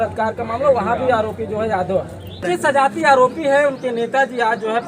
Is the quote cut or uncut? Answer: cut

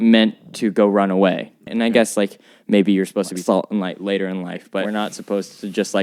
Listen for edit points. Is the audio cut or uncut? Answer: cut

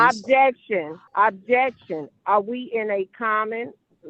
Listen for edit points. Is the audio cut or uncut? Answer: cut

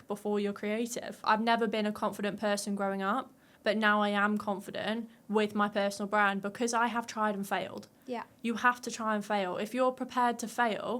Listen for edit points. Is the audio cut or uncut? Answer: cut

